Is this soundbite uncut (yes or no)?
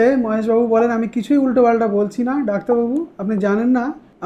yes